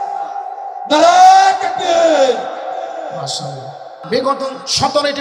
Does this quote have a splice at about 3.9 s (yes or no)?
yes